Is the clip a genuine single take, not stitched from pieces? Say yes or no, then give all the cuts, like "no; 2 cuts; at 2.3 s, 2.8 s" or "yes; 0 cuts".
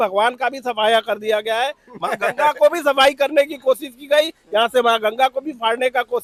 yes; 0 cuts